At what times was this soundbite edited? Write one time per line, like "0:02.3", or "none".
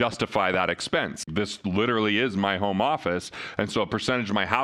0:01.3